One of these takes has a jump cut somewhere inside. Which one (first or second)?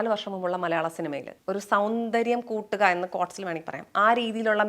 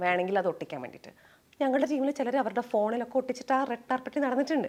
first